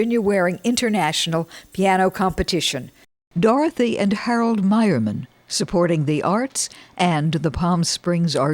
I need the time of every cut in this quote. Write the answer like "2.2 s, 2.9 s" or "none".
3.2 s

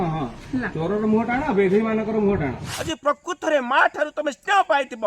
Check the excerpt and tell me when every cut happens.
2.7 s

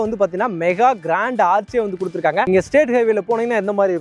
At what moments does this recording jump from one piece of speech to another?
2.5 s

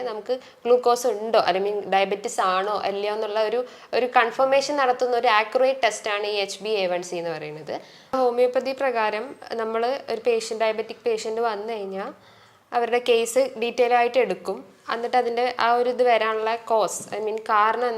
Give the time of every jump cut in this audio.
8.1 s

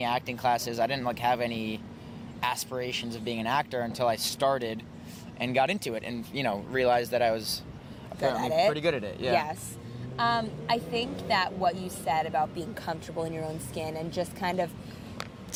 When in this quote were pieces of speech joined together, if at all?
none

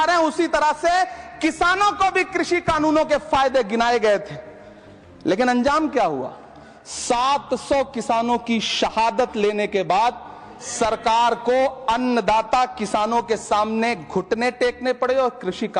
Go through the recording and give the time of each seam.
none

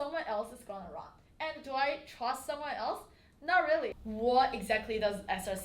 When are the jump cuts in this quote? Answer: 4.0 s

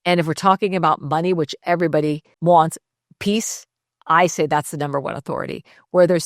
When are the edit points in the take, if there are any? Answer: 2.3 s

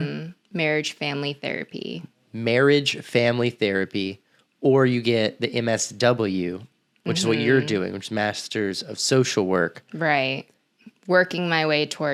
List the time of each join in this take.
none

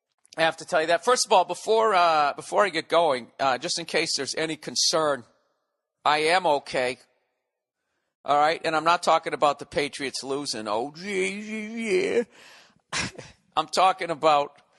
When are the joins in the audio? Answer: none

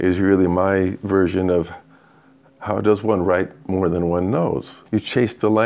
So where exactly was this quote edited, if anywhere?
4.7 s

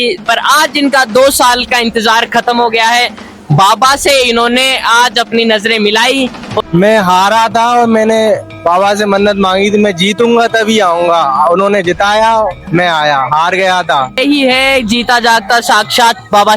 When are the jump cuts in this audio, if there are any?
6.5 s, 14.2 s

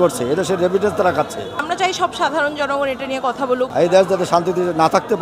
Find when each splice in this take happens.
1.6 s, 3.7 s

